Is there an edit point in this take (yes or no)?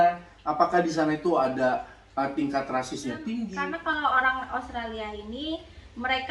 yes